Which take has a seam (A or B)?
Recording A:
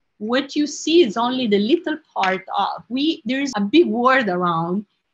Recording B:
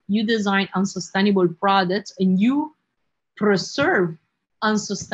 A